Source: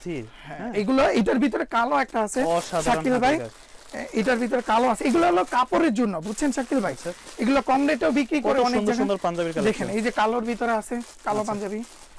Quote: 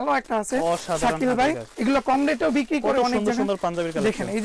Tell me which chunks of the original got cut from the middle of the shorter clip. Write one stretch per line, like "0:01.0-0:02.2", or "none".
0:03.5-0:07.3